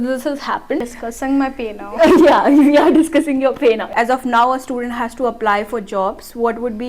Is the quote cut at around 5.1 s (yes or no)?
no